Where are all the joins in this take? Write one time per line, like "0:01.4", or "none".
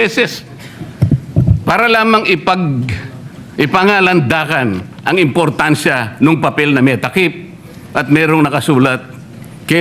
none